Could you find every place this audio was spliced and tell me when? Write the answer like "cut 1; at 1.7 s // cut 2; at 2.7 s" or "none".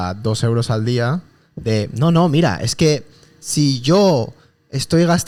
none